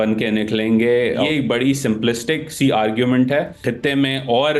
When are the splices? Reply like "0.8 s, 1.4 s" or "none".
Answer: 1.2 s, 3.6 s